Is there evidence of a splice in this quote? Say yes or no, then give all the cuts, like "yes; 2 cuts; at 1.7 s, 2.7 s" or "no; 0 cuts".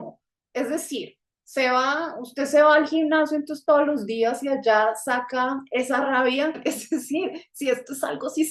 yes; 1 cut; at 6.6 s